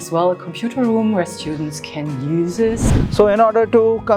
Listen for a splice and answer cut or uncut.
cut